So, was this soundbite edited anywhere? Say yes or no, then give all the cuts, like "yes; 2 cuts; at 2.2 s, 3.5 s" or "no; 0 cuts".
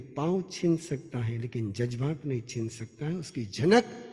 no; 0 cuts